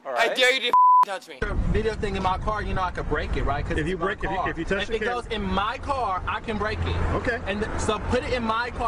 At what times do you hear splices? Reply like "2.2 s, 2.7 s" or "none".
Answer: 1.3 s